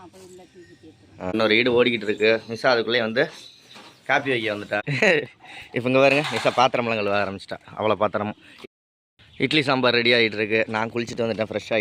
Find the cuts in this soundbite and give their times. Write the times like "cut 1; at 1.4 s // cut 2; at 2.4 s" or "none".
cut 1; at 1.3 s // cut 2; at 4.8 s // cut 3; at 8.5 s